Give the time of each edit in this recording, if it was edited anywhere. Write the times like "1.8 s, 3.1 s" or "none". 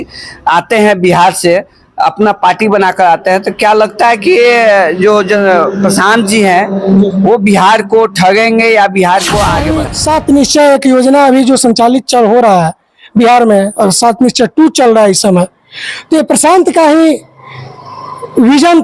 9.8 s